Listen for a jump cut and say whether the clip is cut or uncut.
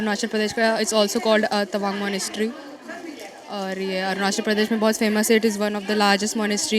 uncut